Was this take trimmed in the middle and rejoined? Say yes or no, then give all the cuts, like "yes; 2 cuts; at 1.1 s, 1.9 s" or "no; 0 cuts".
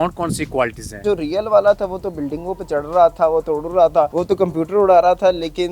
yes; 2 cuts; at 1.0 s, 4.1 s